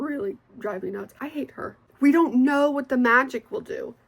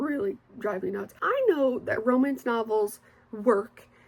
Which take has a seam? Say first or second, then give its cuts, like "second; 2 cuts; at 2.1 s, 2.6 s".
first; 1 cut; at 1.4 s